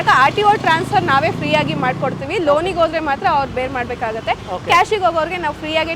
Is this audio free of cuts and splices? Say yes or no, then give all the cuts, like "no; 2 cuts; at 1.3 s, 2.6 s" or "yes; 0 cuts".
yes; 0 cuts